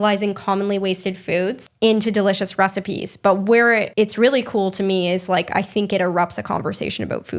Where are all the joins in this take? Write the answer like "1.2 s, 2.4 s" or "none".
1.6 s, 3.9 s